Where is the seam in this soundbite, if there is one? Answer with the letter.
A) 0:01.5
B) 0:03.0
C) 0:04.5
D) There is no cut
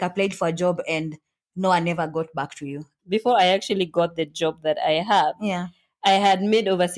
B